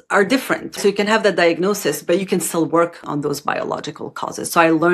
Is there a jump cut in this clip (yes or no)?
yes